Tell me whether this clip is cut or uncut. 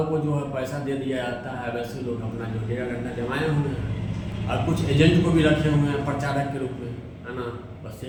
uncut